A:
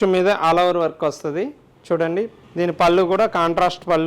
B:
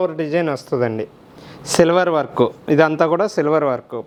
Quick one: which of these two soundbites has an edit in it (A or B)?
A